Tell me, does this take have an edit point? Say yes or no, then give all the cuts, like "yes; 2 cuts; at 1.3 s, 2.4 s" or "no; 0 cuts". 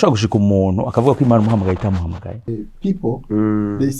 yes; 1 cut; at 2.5 s